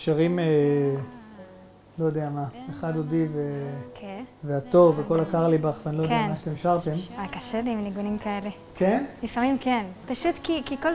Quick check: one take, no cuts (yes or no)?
yes